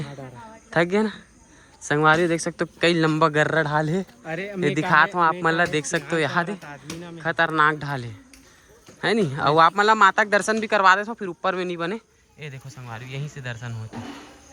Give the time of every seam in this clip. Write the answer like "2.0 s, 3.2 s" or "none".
none